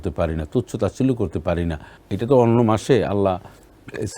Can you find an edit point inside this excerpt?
yes; 1 cut; at 2.0 s

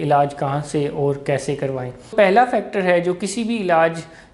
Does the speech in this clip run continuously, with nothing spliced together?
no; 1 cut; at 2.1 s

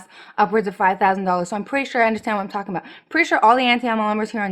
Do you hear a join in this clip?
no; 0 cuts

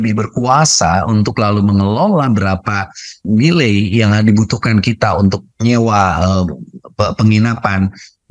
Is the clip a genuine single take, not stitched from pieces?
no; 2 cuts; at 3.2 s, 5.5 s

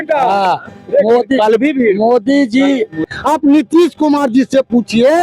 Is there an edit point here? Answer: yes; 1 cut; at 3.1 s

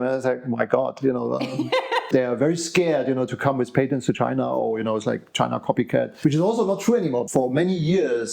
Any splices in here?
yes; 2 cuts; at 2.0 s, 7.2 s

